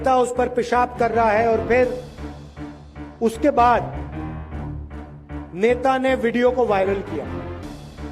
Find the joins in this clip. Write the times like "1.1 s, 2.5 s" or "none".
3.9 s, 5.5 s, 7.1 s